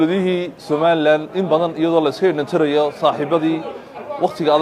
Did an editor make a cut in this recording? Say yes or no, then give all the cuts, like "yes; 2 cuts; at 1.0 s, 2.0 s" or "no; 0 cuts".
no; 0 cuts